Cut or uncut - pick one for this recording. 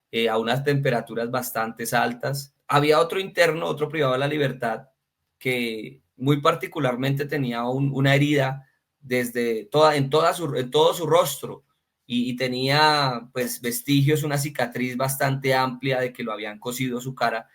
cut